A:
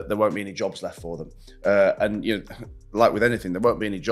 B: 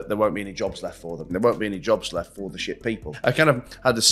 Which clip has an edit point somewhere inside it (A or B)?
B